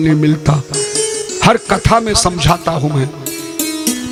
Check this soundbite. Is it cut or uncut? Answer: uncut